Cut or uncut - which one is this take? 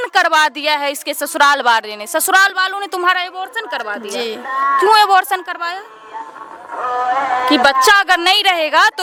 uncut